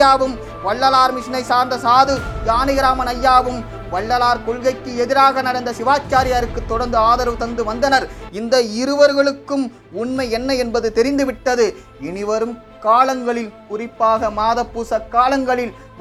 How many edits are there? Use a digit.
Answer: 0